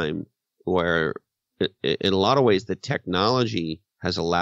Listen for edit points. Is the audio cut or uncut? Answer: uncut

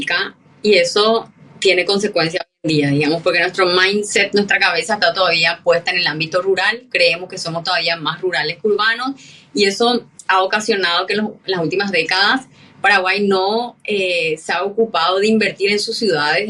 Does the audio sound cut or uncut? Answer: uncut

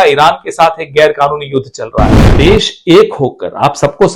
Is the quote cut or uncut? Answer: cut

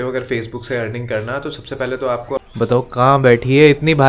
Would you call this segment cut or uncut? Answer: cut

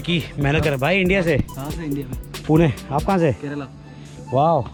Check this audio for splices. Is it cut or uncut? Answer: uncut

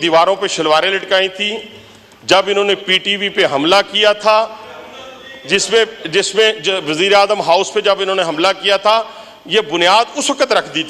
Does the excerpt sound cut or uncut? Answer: uncut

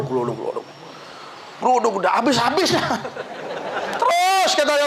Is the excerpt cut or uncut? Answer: uncut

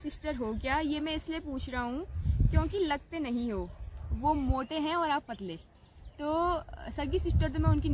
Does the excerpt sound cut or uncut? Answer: uncut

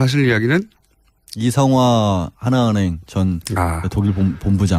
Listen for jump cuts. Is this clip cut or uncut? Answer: cut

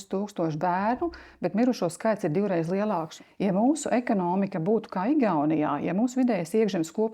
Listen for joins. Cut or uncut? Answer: cut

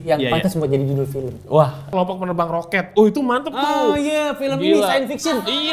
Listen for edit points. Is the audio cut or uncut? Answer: cut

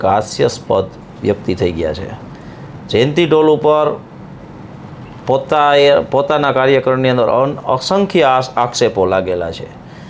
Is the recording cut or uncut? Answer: uncut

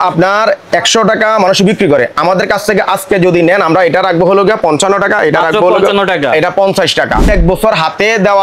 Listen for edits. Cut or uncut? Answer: cut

